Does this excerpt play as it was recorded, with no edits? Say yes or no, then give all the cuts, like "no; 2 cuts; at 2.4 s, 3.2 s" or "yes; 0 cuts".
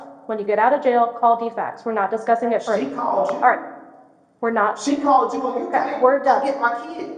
yes; 0 cuts